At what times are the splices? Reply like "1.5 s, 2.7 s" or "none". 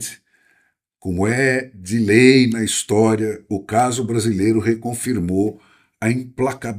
none